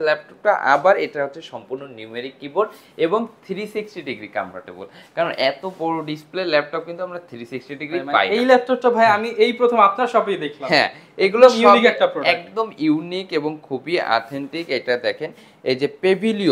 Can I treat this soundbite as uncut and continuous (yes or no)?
yes